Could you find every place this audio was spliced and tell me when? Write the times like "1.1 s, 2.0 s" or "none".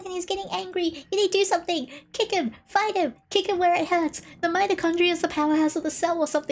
none